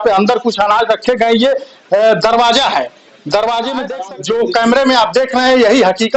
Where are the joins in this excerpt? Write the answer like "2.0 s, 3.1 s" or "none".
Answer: 4.0 s